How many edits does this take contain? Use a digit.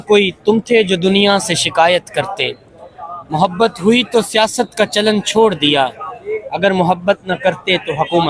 0